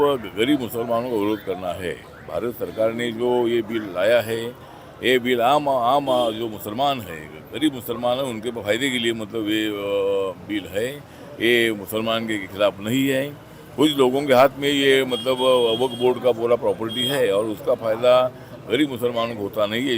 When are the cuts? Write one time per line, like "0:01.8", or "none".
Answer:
none

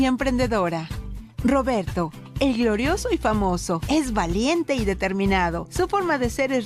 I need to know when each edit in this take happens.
0:05.2

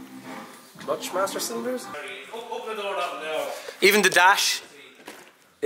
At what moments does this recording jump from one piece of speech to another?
0:01.9

